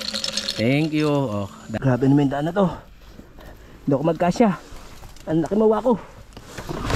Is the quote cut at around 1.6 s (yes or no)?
yes